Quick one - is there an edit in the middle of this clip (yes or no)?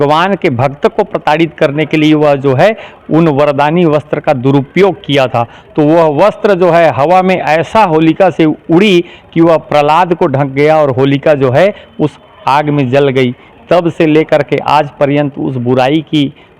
no